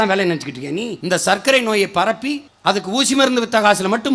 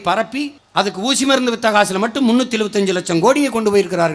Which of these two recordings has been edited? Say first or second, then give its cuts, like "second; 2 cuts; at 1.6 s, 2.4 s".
first; 1 cut; at 0.9 s